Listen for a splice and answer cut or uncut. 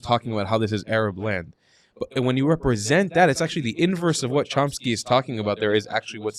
uncut